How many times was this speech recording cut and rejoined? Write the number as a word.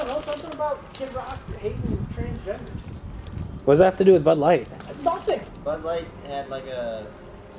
zero